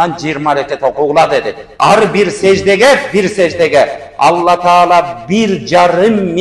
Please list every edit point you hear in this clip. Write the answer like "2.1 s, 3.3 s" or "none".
1.6 s